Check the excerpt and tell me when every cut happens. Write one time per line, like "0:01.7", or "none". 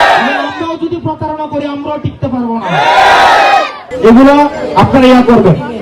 0:03.8